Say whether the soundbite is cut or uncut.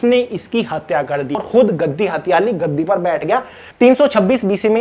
cut